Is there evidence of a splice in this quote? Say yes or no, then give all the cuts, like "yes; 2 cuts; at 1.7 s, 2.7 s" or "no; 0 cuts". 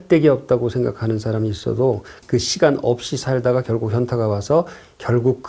yes; 1 cut; at 2.2 s